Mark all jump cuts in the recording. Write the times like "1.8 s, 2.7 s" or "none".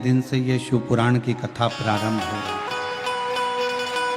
none